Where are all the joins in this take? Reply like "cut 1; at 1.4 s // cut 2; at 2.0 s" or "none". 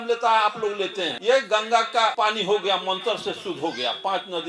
cut 1; at 1.1 s // cut 2; at 2.1 s